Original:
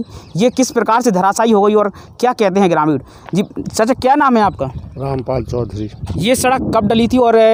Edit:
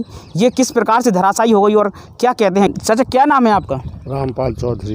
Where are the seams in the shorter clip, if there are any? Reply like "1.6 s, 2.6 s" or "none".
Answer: 2.7 s

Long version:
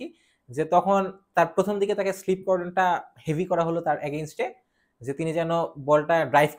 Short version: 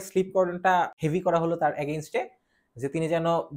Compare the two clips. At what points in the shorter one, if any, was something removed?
1.0 s

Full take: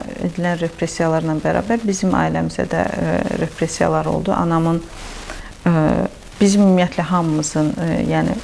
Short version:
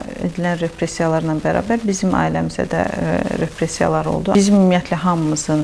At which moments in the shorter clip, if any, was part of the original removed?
4.3 s

